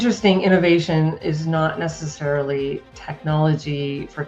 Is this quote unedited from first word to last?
yes; 0 cuts

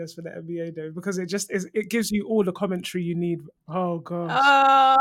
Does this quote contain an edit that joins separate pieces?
yes; 1 cut; at 3.6 s

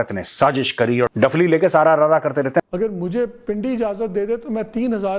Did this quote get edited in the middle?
yes; 1 cut; at 2.7 s

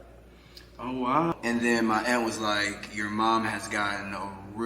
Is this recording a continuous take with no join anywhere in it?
no; 1 cut; at 1.3 s

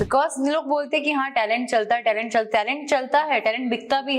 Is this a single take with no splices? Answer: yes; 0 cuts

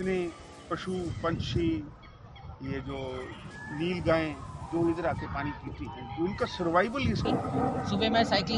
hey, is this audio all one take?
no; 1 cut; at 7.3 s

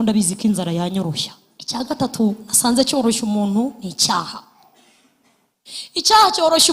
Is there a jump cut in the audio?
yes; 1 cut; at 1.9 s

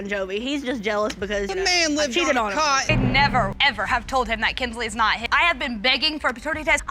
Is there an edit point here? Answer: yes; 1 cut; at 2.9 s

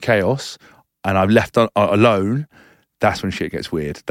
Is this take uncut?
yes; 0 cuts

